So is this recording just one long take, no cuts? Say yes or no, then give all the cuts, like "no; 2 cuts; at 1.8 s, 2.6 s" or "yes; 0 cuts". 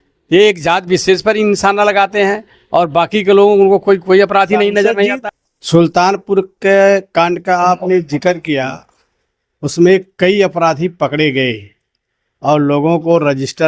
no; 1 cut; at 5.2 s